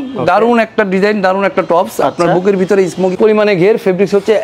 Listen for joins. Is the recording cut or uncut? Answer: cut